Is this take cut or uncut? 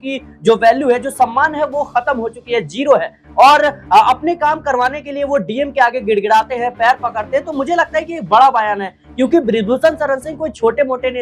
uncut